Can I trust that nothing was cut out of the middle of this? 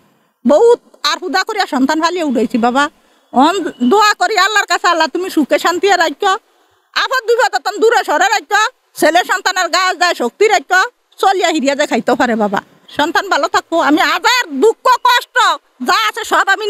no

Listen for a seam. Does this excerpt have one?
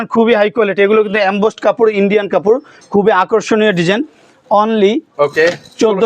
no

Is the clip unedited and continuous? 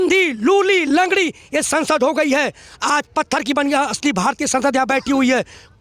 yes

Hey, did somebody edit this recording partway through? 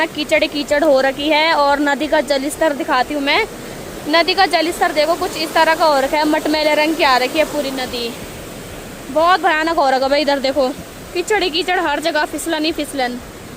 no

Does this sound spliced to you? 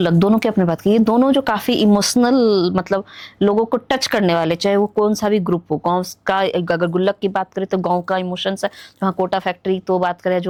no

